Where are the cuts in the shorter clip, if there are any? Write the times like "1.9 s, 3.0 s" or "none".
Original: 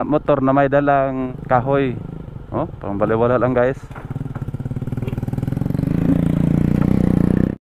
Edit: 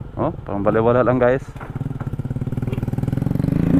none